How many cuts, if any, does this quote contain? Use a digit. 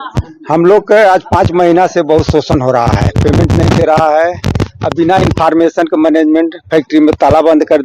0